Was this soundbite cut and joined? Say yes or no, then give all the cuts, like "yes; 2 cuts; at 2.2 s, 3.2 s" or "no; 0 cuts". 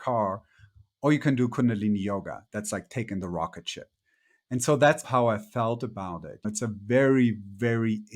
yes; 2 cuts; at 5.0 s, 6.5 s